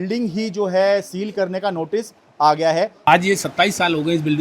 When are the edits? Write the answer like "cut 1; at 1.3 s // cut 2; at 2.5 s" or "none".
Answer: cut 1; at 3.1 s